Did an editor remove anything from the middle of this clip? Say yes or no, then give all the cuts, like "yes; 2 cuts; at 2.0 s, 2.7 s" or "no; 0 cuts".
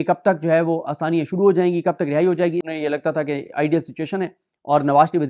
yes; 1 cut; at 2.7 s